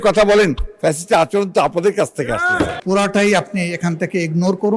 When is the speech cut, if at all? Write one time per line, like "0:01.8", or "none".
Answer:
0:02.8